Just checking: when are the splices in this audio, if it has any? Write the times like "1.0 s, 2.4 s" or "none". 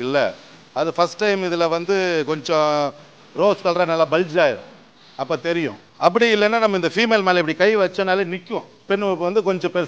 5.8 s, 8.9 s